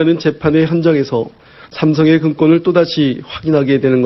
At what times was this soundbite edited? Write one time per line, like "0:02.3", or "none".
0:01.1

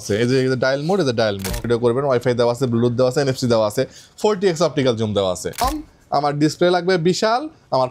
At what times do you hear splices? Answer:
0:01.6
0:05.6

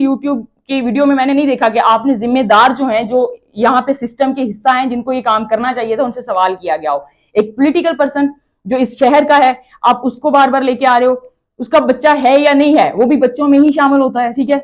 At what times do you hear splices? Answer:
none

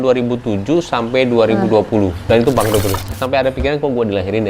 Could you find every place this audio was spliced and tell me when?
0:03.1

